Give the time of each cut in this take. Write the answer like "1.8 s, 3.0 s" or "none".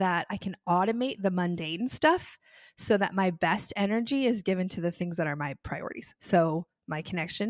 none